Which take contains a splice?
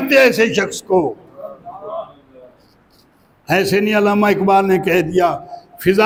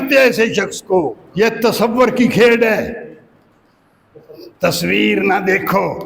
second; 1 cut; at 1.2 s

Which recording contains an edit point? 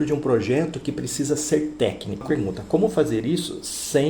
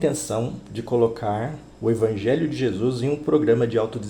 first; 1 cut; at 2.2 s

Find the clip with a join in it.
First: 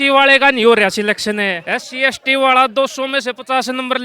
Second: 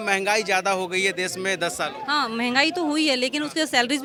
first; 1 cut; at 1.5 s

